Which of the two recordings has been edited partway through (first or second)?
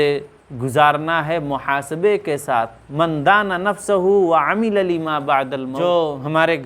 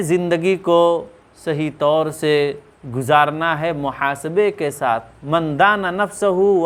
first